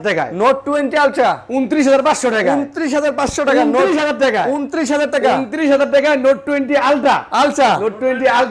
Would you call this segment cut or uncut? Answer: uncut